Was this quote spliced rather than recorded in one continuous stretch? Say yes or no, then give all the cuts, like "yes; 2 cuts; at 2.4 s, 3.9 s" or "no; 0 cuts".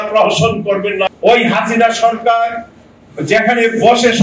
yes; 1 cut; at 1.1 s